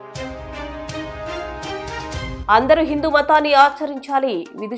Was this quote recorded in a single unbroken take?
no; 2 cuts; at 1.0 s, 2.4 s

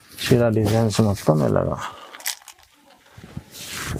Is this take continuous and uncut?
yes; 0 cuts

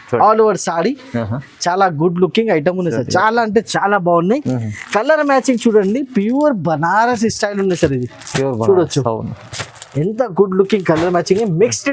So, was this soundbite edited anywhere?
no; 0 cuts

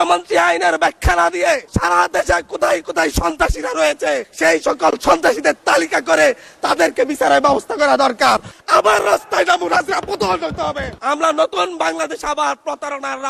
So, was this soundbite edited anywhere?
yes; 4 cuts; at 1.7 s, 4.3 s, 8.5 s, 11.0 s

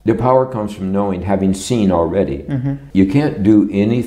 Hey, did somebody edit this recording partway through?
yes; 1 cut; at 2.8 s

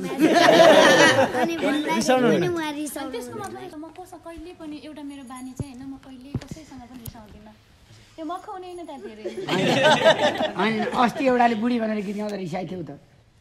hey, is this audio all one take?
no; 1 cut; at 3.7 s

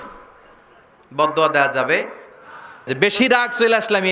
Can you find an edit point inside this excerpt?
yes; 1 cut; at 2.8 s

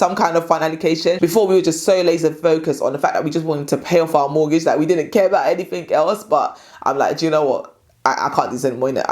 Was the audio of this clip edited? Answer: yes; 1 cut; at 1.2 s

